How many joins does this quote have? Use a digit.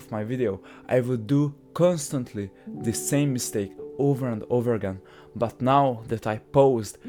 0